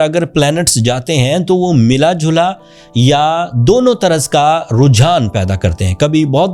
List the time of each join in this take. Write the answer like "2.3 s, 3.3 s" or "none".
none